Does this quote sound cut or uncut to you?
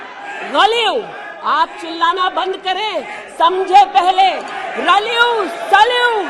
uncut